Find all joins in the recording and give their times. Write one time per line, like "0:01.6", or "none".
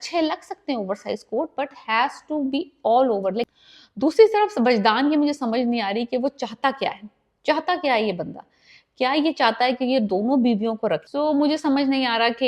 0:03.5
0:11.1